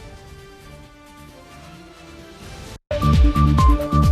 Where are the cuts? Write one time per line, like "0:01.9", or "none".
0:02.8